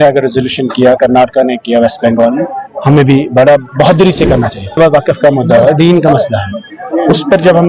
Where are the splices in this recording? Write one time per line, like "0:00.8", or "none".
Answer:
0:04.6